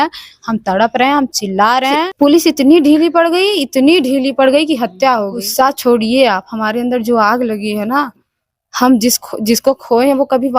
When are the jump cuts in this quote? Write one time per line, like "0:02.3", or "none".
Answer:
0:02.1
0:05.4